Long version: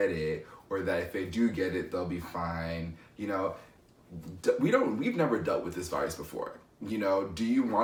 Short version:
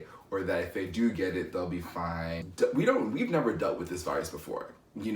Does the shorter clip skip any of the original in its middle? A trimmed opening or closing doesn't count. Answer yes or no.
yes